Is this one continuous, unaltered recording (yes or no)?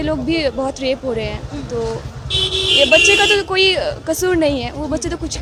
yes